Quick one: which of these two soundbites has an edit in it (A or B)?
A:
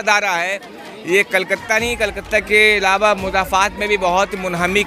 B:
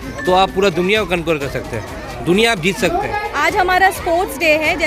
B